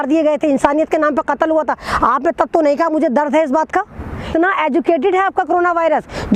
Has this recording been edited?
yes; 1 cut; at 4.3 s

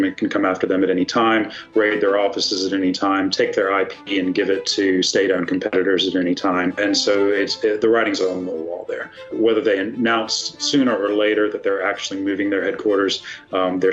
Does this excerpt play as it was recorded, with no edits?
no; 2 cuts; at 6.8 s, 9.3 s

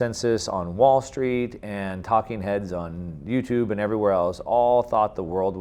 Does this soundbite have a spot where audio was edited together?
no; 0 cuts

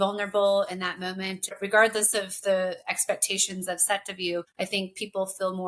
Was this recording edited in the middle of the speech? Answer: yes; 2 cuts; at 1.6 s, 4.5 s

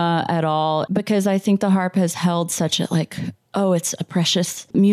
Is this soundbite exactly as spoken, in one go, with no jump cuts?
yes; 0 cuts

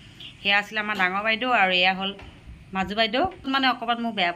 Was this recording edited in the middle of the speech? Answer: yes; 1 cut; at 3.5 s

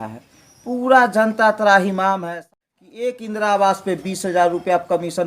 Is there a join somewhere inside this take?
yes; 1 cut; at 2.3 s

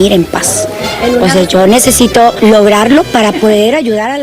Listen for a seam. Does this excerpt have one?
yes; 1 cut; at 2.4 s

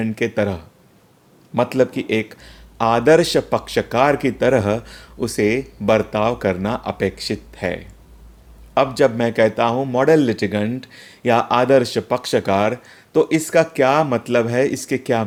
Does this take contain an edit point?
no; 0 cuts

